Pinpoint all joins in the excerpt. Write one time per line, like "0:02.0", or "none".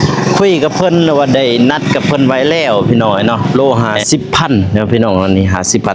0:03.5

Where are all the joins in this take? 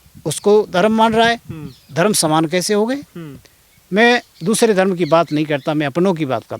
none

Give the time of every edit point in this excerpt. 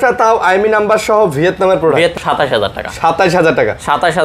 0:02.1

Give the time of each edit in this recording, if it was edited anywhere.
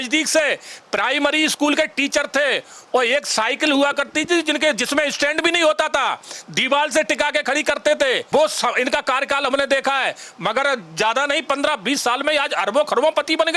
0:08.2

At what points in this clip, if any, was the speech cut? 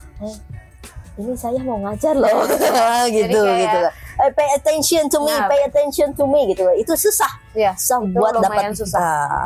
none

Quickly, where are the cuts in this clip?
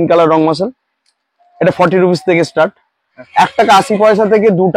0:03.1

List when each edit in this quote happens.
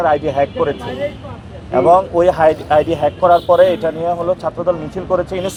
none

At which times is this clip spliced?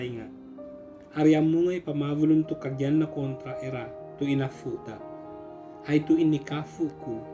none

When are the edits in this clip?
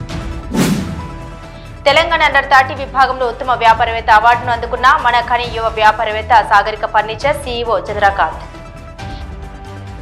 0:01.0

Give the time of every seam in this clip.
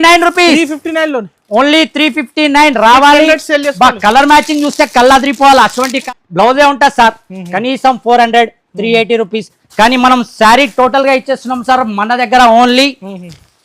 0:06.0

